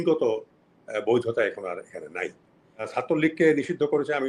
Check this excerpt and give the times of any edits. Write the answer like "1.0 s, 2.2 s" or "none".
2.9 s